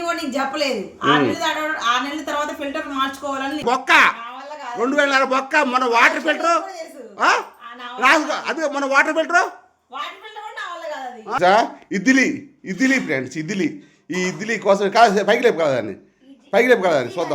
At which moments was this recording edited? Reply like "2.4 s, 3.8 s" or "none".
3.6 s, 11.4 s